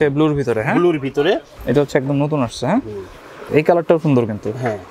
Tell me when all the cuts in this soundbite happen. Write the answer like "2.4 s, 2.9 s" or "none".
1.5 s, 3.5 s